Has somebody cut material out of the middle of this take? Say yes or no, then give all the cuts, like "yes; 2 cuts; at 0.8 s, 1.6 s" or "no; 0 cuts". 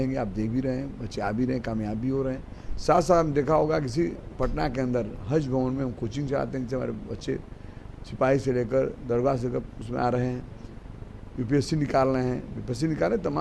no; 0 cuts